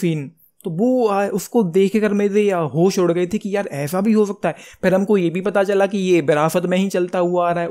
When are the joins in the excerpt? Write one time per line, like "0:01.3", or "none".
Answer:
none